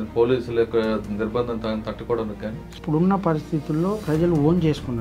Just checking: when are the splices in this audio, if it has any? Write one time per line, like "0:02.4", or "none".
0:02.8